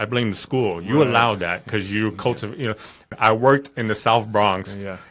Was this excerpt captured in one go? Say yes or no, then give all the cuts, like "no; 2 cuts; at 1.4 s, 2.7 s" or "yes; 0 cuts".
no; 1 cut; at 3.1 s